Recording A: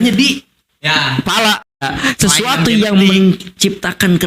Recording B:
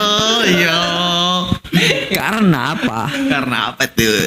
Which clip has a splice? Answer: A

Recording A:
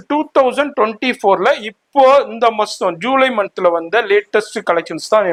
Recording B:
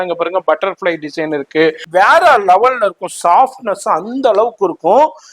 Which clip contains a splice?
B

